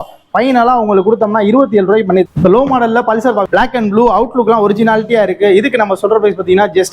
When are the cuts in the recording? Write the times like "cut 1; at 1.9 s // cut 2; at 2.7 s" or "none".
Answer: cut 1; at 2.3 s // cut 2; at 3.5 s